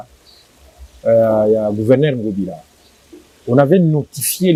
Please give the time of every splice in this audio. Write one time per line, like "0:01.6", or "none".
none

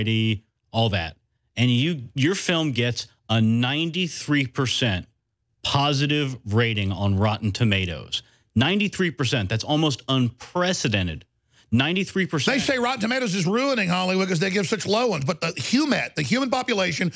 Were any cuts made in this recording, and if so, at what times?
none

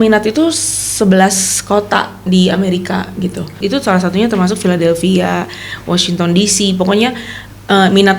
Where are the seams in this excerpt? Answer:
0:03.6

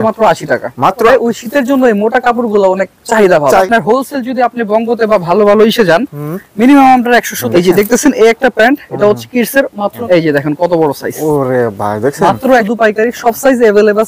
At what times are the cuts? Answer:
0:01.1
0:03.6
0:07.4
0:10.0
0:12.7

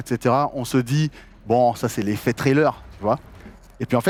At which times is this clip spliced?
none

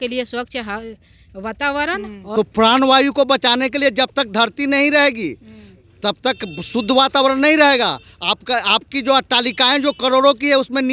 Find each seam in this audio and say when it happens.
0:02.2

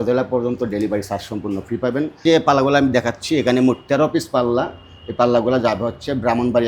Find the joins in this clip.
0:02.2

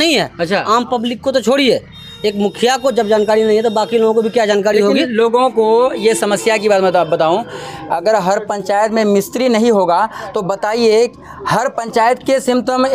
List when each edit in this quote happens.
none

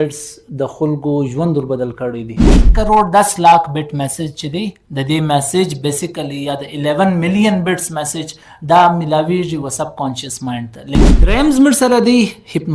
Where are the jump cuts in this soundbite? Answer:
0:02.7
0:11.1

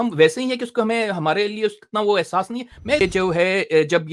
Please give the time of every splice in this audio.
0:03.0

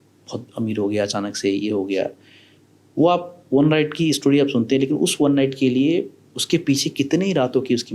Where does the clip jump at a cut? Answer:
none

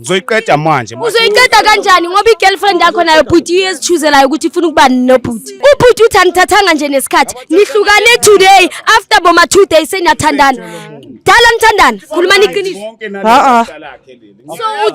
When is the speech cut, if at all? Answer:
0:05.4

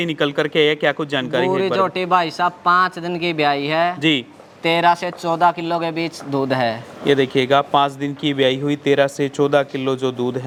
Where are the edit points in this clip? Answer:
none

